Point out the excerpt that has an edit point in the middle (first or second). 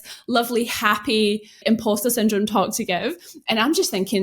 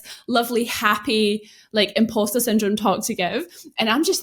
first